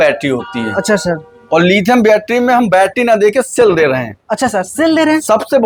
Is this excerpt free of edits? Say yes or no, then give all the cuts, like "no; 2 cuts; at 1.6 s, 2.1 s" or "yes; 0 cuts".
yes; 0 cuts